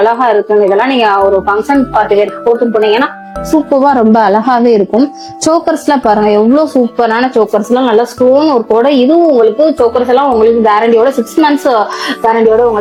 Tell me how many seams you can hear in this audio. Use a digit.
0